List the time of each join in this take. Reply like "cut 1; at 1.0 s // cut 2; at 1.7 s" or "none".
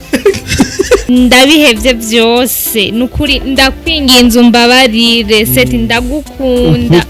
cut 1; at 1.0 s